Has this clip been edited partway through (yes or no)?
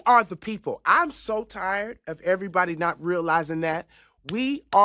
no